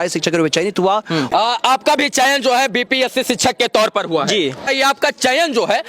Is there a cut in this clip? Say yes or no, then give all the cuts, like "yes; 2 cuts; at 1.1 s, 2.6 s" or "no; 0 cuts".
yes; 2 cuts; at 1.3 s, 4.7 s